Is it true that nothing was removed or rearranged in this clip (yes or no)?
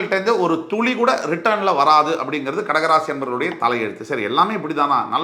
yes